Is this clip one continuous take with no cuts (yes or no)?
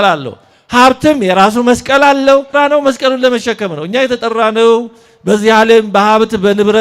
no